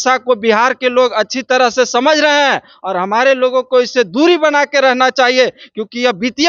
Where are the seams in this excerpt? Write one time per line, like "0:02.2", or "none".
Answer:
none

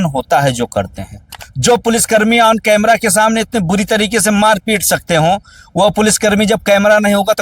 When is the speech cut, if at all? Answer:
0:01.4

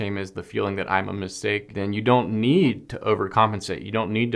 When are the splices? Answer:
0:01.7

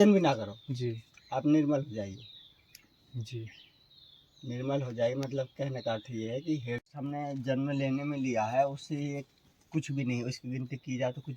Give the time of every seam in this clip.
0:06.8

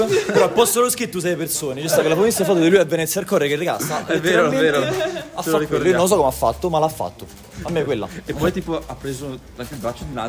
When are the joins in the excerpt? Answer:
none

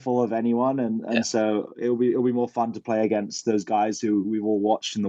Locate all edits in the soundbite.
none

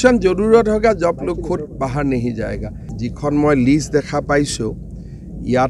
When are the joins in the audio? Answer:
0:02.9

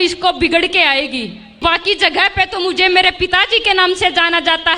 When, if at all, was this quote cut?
0:01.6

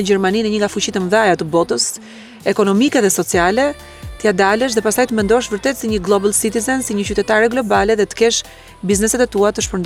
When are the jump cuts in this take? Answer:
none

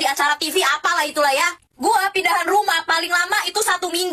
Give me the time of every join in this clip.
0:01.6

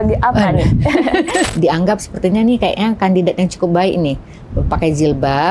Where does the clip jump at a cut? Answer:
0:01.5

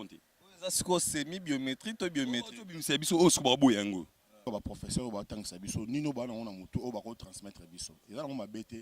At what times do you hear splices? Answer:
0:04.5

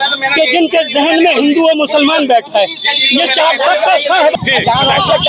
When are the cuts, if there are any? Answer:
0:04.3

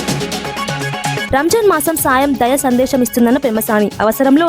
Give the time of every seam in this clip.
0:01.3

